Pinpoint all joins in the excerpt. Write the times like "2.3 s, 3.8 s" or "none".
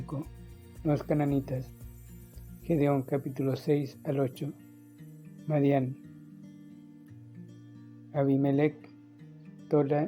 none